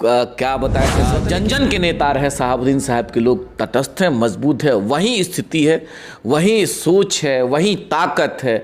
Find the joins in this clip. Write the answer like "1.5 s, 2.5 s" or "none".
1.0 s